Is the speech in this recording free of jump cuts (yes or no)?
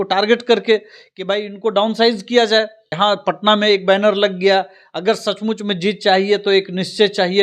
no